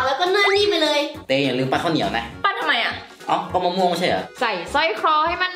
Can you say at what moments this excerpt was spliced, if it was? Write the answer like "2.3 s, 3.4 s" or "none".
1.2 s, 4.3 s